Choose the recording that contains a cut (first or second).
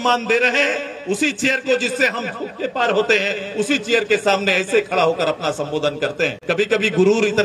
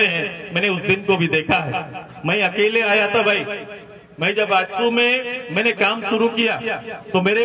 first